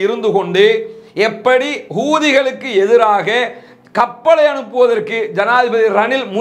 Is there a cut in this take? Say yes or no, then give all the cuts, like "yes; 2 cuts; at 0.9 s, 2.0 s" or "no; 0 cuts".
no; 0 cuts